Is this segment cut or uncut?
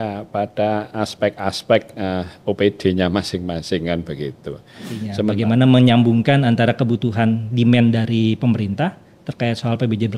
cut